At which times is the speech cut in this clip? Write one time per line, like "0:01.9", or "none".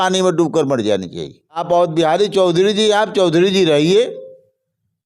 0:01.6